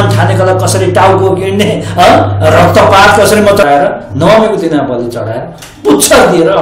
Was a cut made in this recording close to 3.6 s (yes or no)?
yes